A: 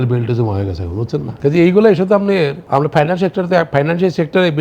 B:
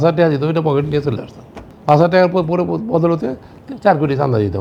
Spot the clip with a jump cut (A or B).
A